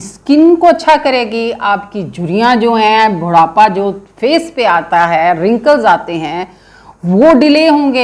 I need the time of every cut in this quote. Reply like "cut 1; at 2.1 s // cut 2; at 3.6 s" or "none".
none